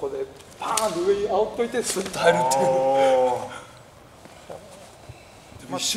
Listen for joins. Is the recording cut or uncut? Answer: uncut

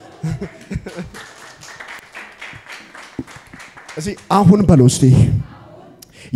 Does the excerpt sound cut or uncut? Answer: uncut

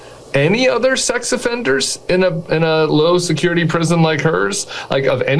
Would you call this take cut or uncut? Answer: uncut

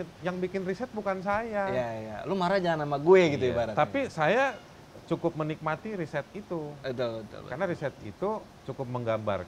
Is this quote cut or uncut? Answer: uncut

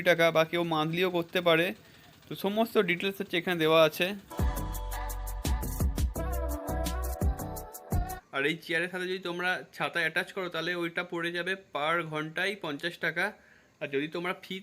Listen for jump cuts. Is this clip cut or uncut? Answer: cut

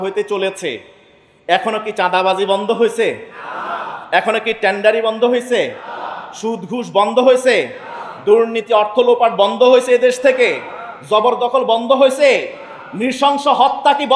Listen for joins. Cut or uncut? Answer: uncut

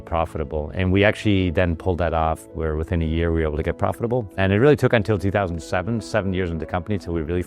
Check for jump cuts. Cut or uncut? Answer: cut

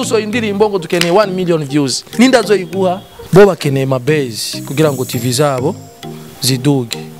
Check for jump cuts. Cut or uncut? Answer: cut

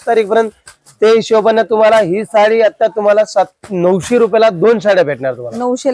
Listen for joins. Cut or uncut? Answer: uncut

